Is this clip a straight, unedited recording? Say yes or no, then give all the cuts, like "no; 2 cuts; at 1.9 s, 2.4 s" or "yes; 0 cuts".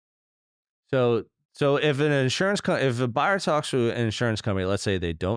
yes; 0 cuts